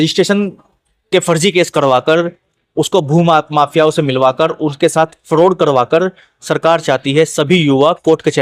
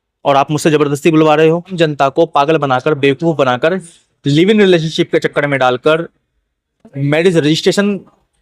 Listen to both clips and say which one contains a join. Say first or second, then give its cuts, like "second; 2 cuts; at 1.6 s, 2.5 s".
second; 1 cut; at 1.7 s